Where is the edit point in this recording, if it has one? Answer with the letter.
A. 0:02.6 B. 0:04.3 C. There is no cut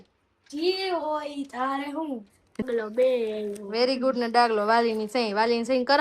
A